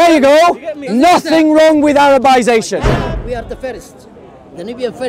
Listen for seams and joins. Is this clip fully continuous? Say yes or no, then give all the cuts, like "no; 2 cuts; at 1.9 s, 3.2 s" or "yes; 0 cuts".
no; 1 cut; at 2.9 s